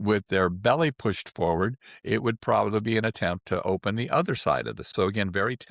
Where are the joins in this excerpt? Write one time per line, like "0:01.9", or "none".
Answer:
0:04.8